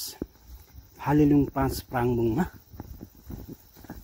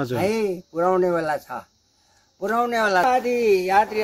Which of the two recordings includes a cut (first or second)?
second